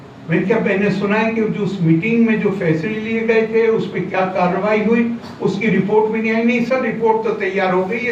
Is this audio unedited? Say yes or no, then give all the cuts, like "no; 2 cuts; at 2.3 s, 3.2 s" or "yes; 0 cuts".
yes; 0 cuts